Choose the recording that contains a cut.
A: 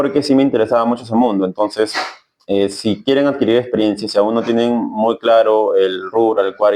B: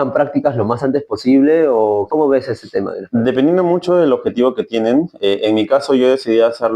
B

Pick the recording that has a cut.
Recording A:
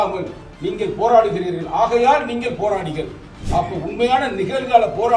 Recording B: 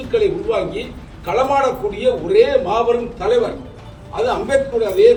A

